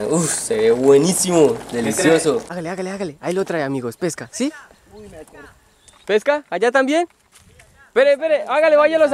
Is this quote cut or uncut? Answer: cut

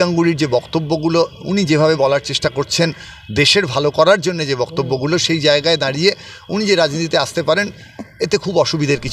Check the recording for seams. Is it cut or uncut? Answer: uncut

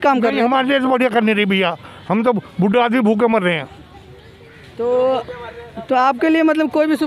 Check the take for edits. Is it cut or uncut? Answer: uncut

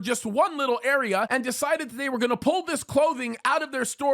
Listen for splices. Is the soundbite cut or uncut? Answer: cut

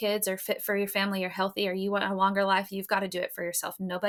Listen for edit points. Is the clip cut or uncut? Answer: uncut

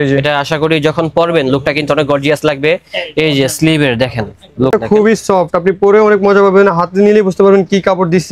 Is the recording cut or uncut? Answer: cut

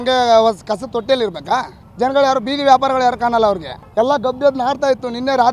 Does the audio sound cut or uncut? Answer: cut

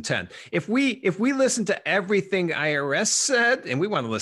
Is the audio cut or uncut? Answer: uncut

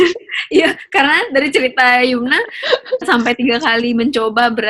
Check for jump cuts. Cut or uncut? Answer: cut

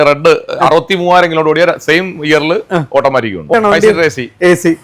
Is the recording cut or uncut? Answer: cut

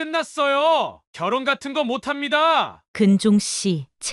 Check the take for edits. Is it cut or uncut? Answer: uncut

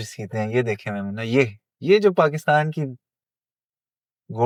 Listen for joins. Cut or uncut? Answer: uncut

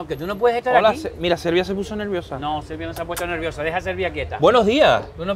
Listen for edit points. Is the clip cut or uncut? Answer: uncut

